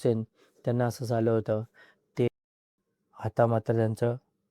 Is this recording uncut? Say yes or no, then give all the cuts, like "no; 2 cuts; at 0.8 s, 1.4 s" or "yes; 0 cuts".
no; 1 cut; at 2.3 s